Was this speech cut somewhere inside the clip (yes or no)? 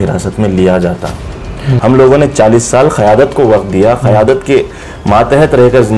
yes